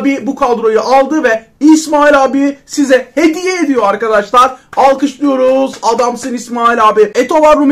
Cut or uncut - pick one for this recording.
uncut